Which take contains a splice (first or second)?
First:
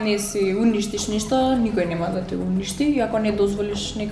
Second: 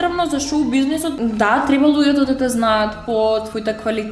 second